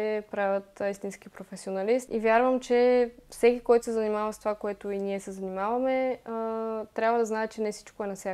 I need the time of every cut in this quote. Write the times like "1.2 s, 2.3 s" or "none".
2.1 s